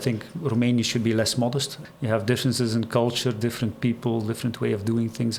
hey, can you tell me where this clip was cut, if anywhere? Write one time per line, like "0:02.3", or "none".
0:01.7